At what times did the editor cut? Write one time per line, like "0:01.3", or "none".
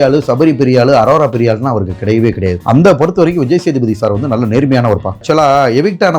0:02.6
0:05.2